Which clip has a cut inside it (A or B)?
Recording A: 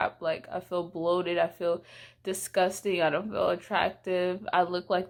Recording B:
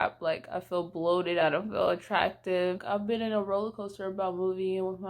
B